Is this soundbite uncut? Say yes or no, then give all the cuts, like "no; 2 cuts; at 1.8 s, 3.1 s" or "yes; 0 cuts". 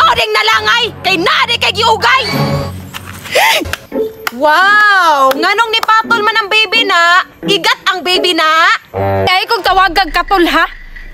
no; 2 cuts; at 3.7 s, 9.3 s